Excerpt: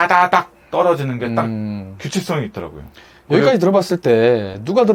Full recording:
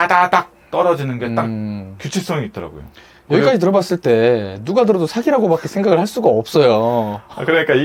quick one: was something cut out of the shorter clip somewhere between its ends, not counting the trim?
no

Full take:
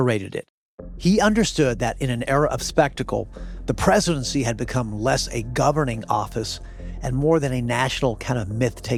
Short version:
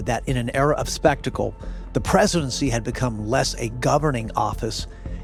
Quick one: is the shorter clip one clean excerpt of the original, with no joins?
yes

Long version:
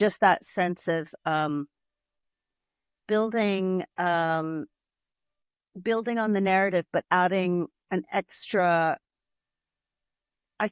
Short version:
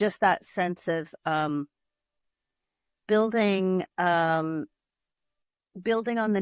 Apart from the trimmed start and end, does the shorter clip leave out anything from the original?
no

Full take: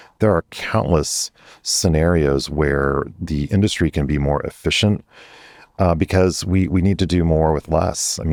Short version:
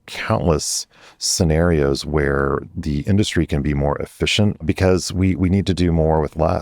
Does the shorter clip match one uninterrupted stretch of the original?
no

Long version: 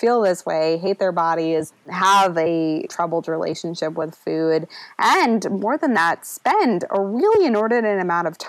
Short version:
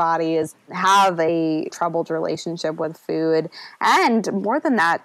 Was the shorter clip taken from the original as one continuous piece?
yes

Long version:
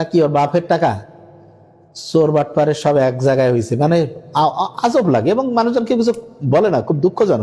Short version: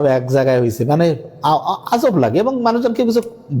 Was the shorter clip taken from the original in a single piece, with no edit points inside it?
yes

